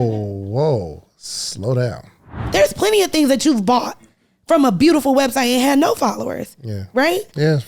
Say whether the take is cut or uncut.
cut